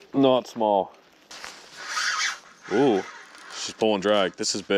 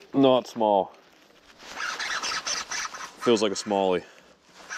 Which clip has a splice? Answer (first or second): first